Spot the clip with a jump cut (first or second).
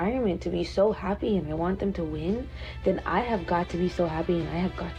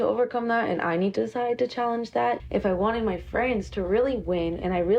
second